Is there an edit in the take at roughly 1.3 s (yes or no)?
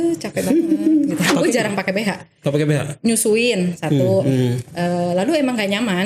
yes